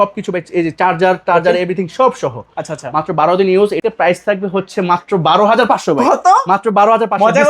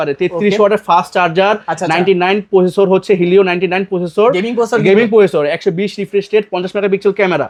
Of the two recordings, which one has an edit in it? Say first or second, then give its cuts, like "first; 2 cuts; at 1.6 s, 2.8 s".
first; 1 cut; at 3.8 s